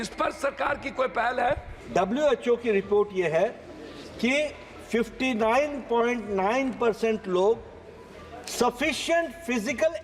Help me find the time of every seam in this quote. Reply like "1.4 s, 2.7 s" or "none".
1.7 s